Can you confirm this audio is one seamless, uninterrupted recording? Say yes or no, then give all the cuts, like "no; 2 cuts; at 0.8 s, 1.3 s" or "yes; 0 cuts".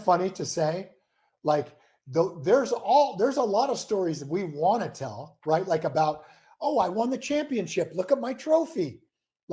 yes; 0 cuts